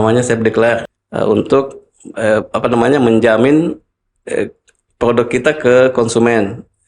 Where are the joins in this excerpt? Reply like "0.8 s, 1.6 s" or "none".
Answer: 1.0 s